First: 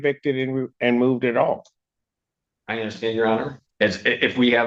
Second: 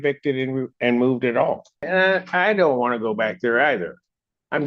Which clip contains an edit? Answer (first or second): second